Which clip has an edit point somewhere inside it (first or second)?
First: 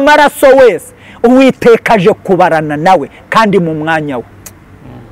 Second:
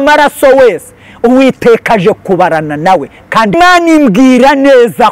second